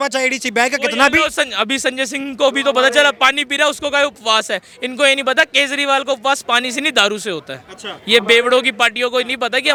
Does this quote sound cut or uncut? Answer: uncut